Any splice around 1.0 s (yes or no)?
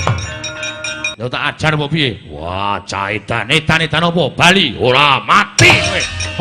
yes